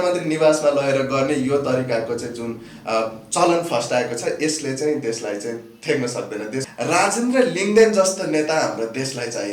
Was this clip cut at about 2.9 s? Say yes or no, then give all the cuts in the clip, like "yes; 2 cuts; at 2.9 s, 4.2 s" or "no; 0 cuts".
no; 1 cut; at 6.6 s